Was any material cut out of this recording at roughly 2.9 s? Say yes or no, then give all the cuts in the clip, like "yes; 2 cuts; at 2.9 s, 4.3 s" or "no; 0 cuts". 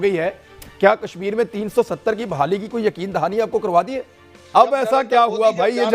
no; 1 cut; at 4.4 s